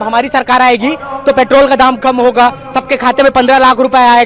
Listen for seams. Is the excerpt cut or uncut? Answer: uncut